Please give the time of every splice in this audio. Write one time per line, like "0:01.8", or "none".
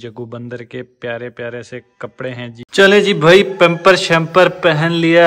0:02.6